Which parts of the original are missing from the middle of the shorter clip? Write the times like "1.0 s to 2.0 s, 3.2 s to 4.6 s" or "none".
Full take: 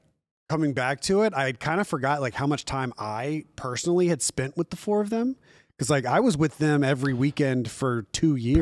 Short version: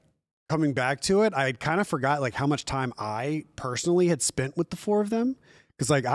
none